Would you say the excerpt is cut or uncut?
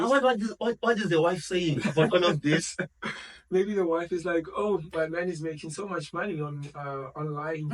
uncut